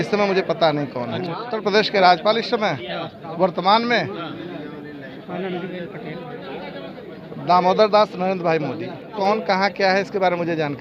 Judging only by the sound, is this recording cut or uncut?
cut